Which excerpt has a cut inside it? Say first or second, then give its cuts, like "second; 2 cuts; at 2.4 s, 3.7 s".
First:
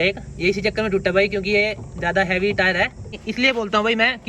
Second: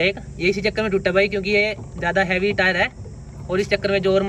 first; 1 cut; at 3.2 s